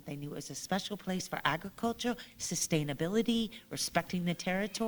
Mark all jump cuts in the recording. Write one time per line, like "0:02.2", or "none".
none